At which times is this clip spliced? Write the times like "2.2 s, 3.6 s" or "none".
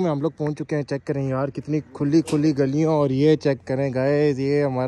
none